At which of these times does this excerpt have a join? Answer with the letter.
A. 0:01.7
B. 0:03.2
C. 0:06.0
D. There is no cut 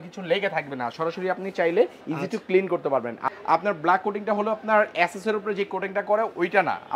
B